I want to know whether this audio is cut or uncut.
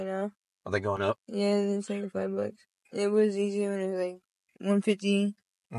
cut